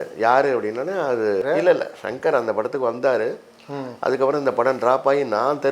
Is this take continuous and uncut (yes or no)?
no